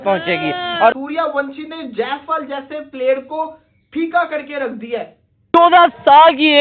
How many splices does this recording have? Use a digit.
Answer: 2